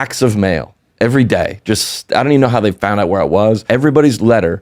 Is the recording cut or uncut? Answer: cut